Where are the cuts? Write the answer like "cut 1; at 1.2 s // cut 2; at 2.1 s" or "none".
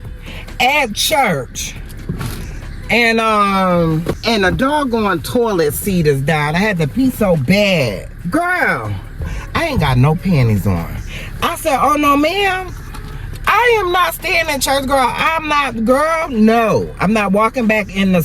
cut 1; at 4.2 s // cut 2; at 8.1 s